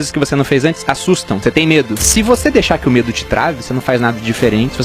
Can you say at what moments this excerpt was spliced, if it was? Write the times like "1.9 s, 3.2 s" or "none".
1.6 s